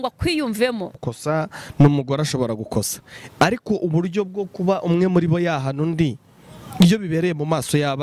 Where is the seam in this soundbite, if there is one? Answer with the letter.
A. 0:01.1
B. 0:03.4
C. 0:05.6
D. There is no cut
A